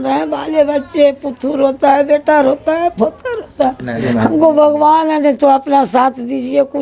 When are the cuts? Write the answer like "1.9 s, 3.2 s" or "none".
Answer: 4.0 s